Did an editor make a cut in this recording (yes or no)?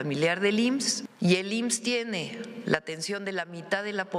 yes